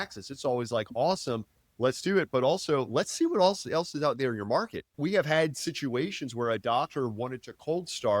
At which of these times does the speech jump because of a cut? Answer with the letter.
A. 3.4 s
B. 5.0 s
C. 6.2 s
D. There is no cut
B